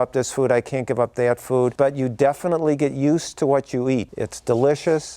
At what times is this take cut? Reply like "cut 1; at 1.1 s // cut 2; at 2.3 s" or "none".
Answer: cut 1; at 1.7 s // cut 2; at 4.1 s